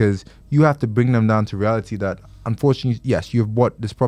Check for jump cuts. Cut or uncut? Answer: uncut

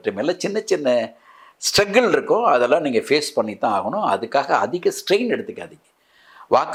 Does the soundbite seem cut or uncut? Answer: uncut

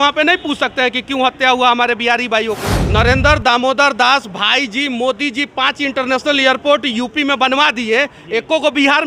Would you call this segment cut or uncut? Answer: cut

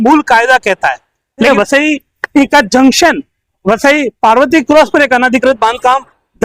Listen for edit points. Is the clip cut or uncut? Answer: cut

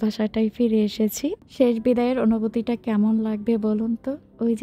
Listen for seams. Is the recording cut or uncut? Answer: cut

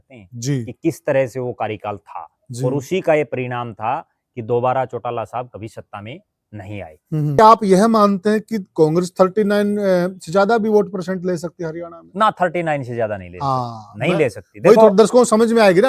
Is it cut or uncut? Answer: cut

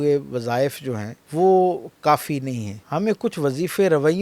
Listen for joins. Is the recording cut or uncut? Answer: cut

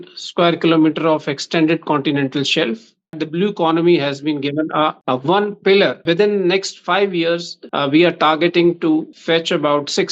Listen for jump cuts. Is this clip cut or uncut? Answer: cut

